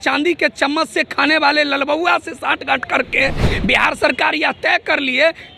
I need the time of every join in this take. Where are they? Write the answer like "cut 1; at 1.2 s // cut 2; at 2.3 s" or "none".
none